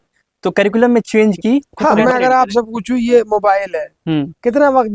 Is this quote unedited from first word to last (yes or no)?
no